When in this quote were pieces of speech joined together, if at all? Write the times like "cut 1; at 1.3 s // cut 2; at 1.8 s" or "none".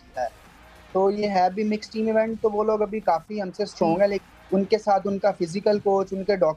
cut 1; at 4.2 s

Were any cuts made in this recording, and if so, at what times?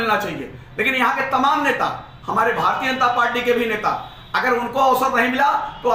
none

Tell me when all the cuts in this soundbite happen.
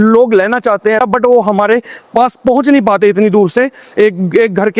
cut 1; at 1.0 s

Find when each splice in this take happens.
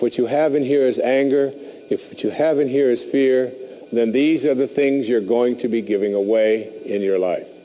cut 1; at 5.9 s

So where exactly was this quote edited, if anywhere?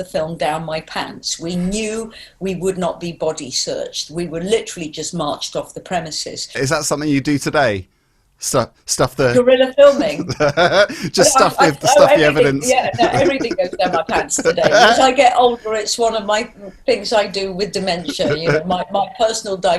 cut 1; at 6.6 s // cut 2; at 14.9 s

